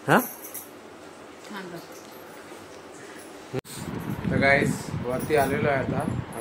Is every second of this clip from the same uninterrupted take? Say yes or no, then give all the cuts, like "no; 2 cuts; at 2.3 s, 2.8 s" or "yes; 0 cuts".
no; 1 cut; at 3.6 s